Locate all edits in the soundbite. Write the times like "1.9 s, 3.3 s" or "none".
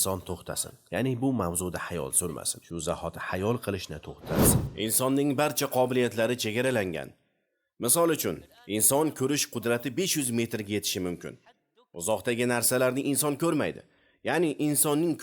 4.6 s